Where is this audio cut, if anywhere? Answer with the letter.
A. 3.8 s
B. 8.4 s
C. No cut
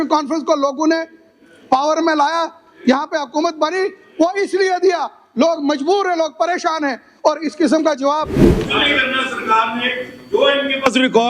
B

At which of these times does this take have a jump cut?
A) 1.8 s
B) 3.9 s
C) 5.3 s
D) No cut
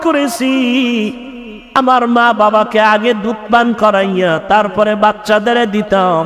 A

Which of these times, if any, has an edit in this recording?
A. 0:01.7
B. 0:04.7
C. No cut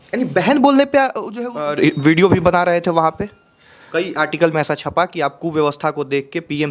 A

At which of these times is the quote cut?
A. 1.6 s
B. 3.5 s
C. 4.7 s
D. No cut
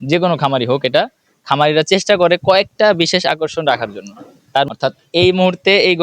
C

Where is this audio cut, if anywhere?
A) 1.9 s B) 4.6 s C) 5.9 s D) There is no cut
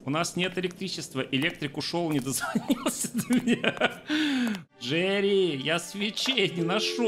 B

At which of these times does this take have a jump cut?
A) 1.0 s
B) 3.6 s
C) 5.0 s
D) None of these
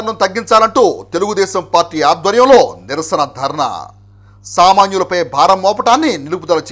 D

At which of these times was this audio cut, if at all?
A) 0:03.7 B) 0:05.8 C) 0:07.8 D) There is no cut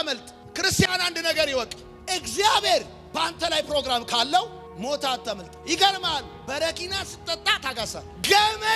D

